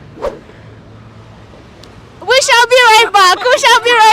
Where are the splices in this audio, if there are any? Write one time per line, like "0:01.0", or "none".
none